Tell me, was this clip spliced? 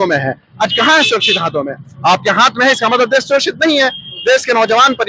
no; 0 cuts

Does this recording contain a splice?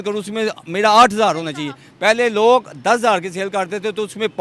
no; 0 cuts

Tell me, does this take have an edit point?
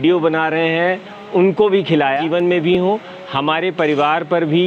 yes; 1 cut; at 2.2 s

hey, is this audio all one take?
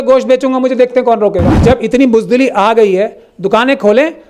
no; 1 cut; at 1.5 s

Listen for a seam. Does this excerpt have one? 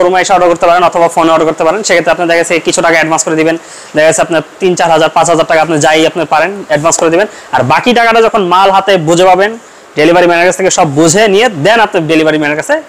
no; 0 cuts

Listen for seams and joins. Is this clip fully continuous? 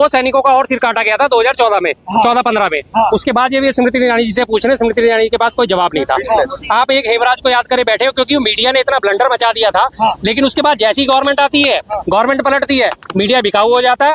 yes; 0 cuts

